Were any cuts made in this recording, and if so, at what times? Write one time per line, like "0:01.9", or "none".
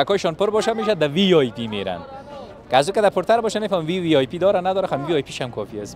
none